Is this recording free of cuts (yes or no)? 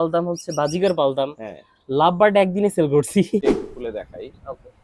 no